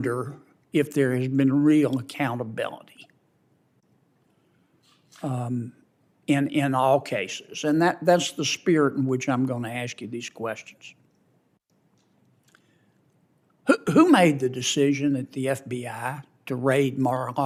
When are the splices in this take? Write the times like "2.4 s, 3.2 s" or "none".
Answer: none